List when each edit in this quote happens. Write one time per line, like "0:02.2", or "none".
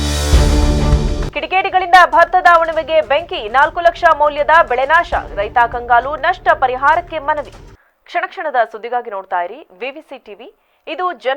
none